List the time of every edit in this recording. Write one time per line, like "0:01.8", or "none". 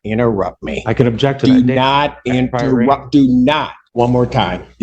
0:03.8